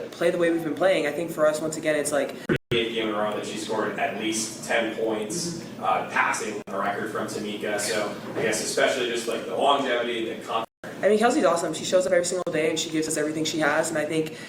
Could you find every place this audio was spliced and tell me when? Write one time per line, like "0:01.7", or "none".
0:02.7
0:10.8

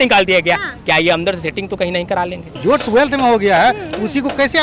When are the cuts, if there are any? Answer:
0:02.5

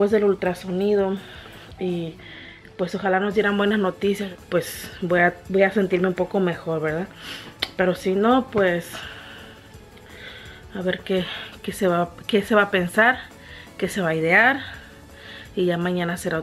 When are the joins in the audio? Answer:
0:04.2

